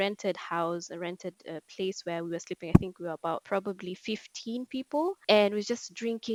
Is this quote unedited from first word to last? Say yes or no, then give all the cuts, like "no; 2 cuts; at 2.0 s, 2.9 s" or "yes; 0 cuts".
yes; 0 cuts